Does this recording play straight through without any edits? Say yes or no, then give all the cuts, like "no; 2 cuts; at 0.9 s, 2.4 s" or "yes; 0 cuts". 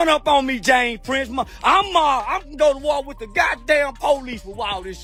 yes; 0 cuts